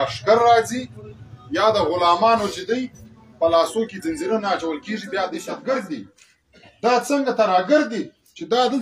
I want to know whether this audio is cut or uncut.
cut